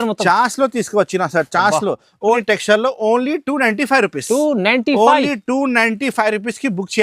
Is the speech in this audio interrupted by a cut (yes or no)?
yes